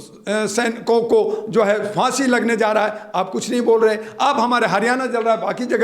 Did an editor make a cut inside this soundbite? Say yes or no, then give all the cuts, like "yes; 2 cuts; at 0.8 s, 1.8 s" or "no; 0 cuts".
no; 0 cuts